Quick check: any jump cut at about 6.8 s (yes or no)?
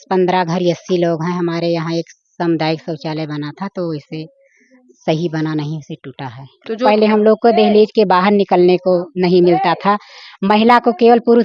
yes